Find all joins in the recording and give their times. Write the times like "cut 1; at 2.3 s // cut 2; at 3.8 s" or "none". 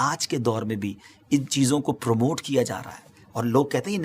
none